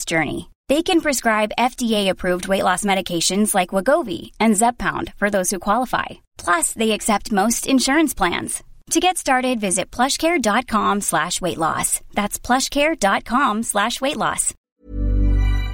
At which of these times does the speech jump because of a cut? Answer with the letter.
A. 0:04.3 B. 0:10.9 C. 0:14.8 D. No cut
C